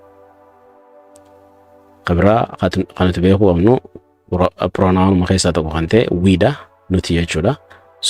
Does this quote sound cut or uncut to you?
cut